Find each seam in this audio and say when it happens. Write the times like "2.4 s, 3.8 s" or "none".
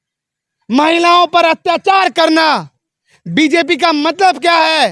none